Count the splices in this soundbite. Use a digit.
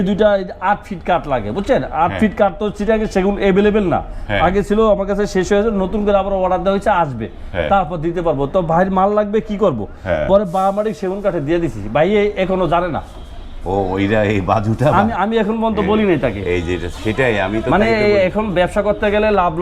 0